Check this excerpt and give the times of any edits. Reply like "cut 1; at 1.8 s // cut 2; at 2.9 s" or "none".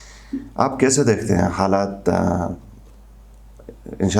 none